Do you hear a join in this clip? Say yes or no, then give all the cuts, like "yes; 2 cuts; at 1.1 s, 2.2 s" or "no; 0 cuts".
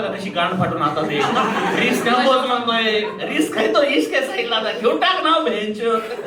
no; 0 cuts